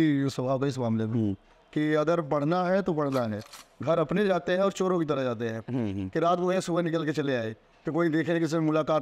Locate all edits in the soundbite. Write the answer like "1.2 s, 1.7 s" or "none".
3.4 s

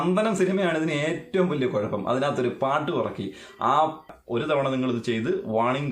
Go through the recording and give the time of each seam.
4.1 s

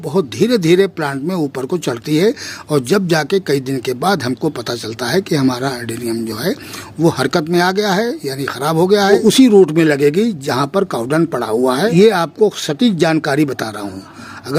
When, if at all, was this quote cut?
9.1 s, 11.9 s

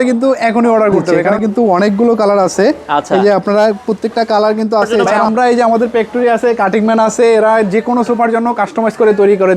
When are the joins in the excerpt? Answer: 1.3 s, 5.2 s

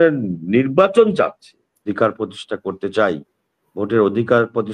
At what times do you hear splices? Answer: 1.8 s

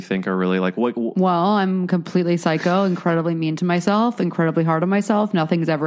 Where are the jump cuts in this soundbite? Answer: none

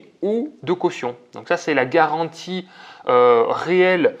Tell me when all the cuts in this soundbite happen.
none

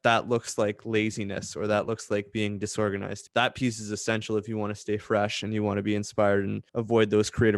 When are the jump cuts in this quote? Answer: 3.2 s, 6.6 s

